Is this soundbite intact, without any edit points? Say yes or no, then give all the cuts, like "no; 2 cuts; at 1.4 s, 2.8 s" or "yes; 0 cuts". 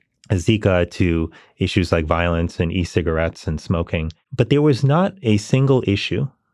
no; 1 cut; at 4.2 s